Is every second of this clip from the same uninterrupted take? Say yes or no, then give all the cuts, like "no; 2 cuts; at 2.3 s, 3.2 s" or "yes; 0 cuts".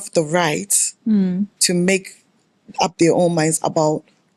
yes; 0 cuts